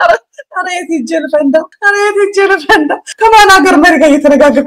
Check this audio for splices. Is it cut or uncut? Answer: uncut